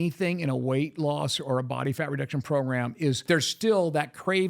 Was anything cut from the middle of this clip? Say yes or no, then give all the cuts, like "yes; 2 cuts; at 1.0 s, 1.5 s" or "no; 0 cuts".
yes; 1 cut; at 3.3 s